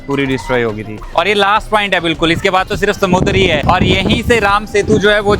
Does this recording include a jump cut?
yes; 2 cuts; at 1.0 s, 3.6 s

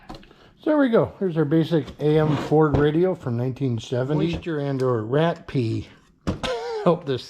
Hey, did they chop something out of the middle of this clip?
yes; 1 cut; at 4.4 s

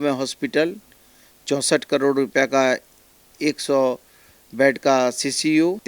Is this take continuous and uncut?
yes; 0 cuts

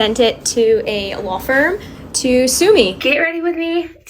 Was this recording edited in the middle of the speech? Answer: yes; 1 cut; at 3.0 s

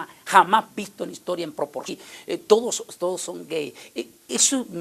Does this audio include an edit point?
no; 0 cuts

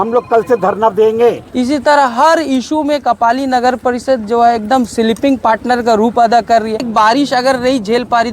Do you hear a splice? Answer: yes; 2 cuts; at 1.4 s, 6.9 s

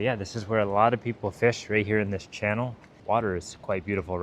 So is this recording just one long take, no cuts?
no; 1 cut; at 2.9 s

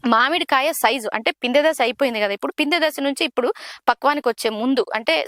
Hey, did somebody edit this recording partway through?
no; 0 cuts

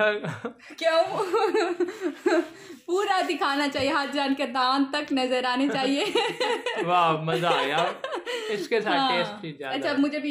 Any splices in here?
no; 0 cuts

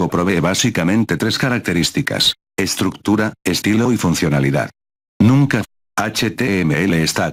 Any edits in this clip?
no; 0 cuts

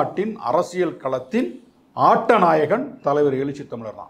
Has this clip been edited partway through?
no; 0 cuts

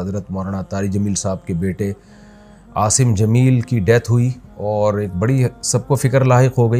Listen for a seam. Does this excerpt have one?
no; 0 cuts

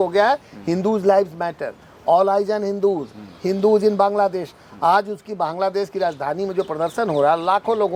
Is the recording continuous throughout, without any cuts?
yes; 0 cuts

